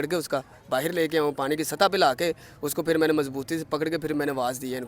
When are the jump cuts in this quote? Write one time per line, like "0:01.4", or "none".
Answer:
none